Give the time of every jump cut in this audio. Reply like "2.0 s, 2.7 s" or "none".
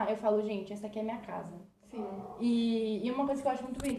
none